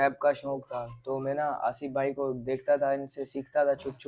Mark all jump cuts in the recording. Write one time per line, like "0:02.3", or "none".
none